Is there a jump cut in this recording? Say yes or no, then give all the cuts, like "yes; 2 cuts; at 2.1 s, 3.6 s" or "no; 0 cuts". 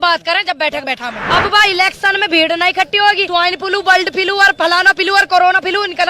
yes; 2 cuts; at 1.2 s, 3.2 s